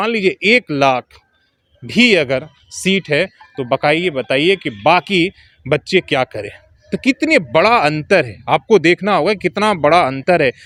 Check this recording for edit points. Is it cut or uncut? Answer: uncut